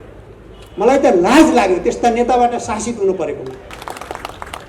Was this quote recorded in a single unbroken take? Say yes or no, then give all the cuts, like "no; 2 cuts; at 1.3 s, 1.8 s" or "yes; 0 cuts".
no; 1 cut; at 3.8 s